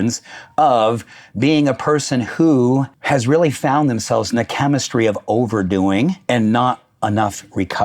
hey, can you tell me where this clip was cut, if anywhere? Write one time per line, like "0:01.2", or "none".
0:02.9
0:06.2